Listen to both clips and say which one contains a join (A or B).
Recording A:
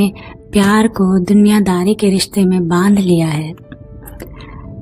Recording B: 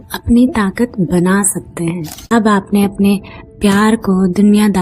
B